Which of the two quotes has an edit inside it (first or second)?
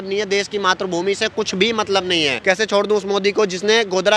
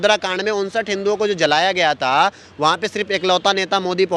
first